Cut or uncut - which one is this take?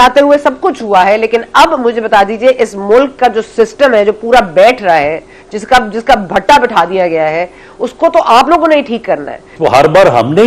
cut